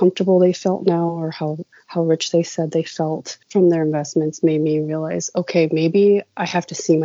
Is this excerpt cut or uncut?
uncut